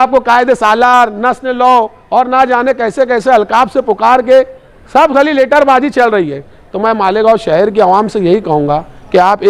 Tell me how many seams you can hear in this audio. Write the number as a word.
zero